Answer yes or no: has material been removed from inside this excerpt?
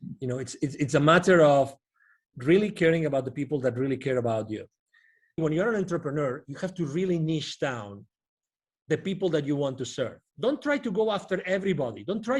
yes